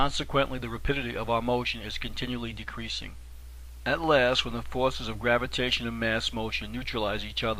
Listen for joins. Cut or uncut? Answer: uncut